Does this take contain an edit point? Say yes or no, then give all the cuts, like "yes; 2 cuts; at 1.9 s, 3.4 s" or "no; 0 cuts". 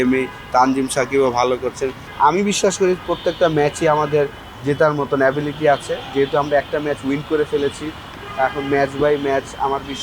yes; 1 cut; at 2.0 s